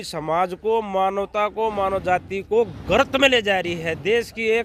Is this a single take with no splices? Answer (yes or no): yes